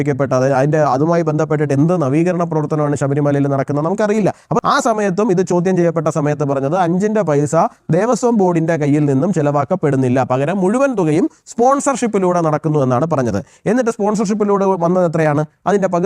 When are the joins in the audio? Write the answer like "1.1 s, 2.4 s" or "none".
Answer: 4.6 s